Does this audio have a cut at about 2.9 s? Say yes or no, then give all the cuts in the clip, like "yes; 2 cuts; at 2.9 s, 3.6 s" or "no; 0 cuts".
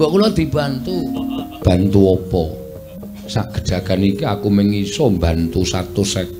yes; 2 cuts; at 1.5 s, 2.9 s